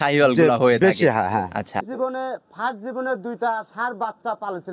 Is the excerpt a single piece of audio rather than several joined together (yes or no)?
no